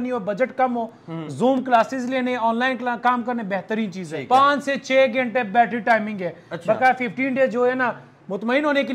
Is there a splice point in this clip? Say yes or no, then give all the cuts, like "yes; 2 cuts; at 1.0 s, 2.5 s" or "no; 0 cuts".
yes; 1 cut; at 4.1 s